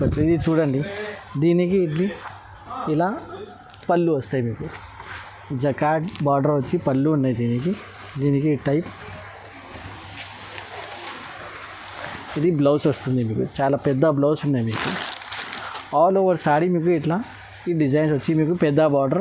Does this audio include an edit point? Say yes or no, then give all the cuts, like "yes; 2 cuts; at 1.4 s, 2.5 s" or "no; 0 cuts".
no; 0 cuts